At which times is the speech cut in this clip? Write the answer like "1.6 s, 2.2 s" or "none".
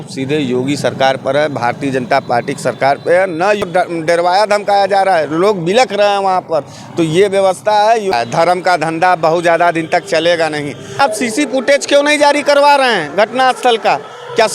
3.6 s, 8.1 s, 11.0 s